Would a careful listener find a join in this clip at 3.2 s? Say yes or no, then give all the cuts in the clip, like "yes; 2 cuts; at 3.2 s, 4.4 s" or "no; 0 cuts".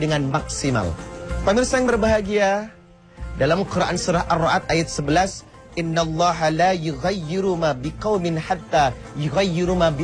no; 1 cut; at 1.7 s